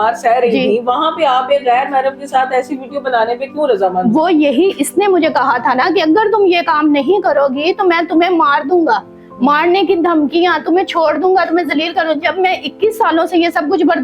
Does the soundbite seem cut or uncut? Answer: uncut